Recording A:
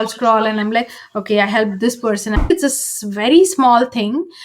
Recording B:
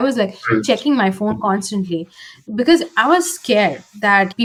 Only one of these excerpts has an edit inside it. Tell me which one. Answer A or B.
A